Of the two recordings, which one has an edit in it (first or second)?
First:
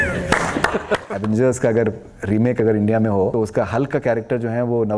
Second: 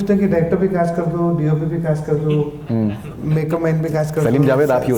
first